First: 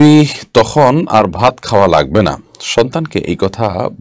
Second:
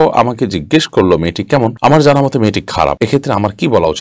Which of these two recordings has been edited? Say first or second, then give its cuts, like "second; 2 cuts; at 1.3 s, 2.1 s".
second; 2 cuts; at 1.7 s, 3.0 s